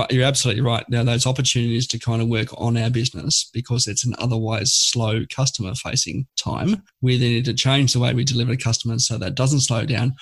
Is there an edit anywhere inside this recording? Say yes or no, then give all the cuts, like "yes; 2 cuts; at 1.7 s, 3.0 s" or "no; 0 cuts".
yes; 1 cut; at 6.6 s